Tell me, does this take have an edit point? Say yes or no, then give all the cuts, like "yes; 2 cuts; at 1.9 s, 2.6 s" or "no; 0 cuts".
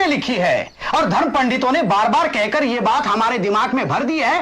no; 0 cuts